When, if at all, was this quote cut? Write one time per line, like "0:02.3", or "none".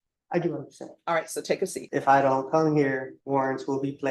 0:01.8
0:03.1